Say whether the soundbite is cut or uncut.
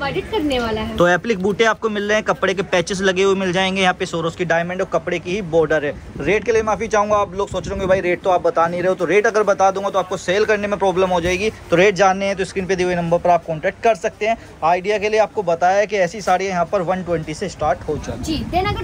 uncut